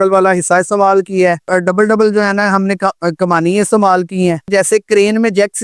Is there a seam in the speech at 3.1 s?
no; 2 cuts; at 1.5 s, 4.5 s

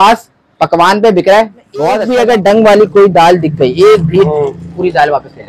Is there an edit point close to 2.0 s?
yes; 1 cut; at 2.0 s

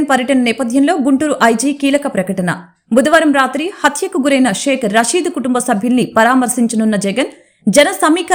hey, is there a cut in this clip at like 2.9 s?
no; 0 cuts

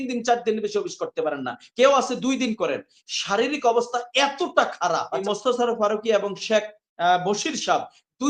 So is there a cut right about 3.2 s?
no; 1 cut; at 5.2 s

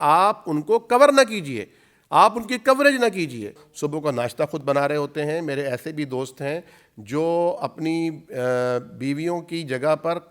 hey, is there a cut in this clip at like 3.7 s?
yes; 1 cut; at 3.7 s

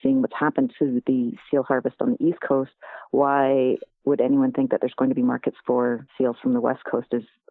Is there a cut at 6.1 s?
yes; 1 cut; at 6.1 s

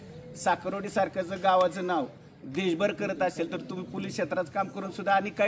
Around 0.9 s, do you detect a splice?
no; 0 cuts

